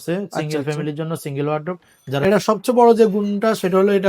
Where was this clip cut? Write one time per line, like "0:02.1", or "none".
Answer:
0:02.2